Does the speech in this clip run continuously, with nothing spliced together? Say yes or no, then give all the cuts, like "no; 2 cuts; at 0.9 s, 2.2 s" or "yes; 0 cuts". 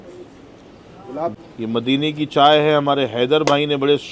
no; 1 cut; at 1.3 s